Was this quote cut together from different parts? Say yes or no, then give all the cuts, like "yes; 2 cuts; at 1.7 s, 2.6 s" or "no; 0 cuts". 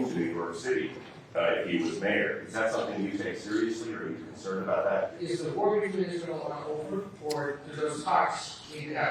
yes; 2 cuts; at 5.2 s, 7.1 s